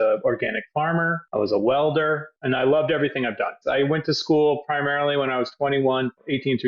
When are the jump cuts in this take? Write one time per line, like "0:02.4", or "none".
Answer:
0:02.3
0:03.6

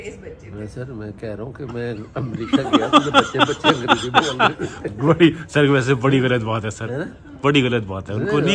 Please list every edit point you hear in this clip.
none

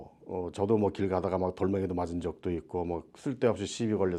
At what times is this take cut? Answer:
none

